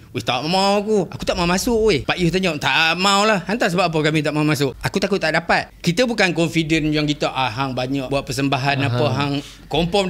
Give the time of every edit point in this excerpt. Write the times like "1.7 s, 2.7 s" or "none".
2.1 s, 4.8 s, 5.7 s, 8.1 s